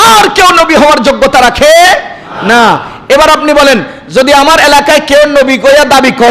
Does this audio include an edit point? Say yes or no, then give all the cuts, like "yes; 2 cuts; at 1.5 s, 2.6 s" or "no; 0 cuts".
no; 0 cuts